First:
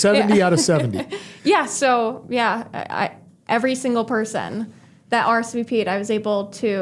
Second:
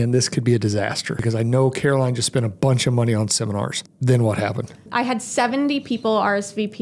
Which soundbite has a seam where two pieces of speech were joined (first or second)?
second